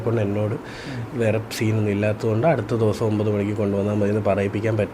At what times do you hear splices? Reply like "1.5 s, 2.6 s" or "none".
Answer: none